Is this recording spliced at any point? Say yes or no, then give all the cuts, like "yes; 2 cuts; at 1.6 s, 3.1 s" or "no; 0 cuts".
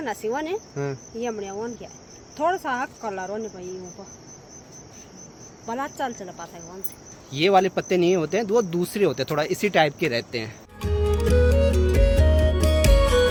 no; 0 cuts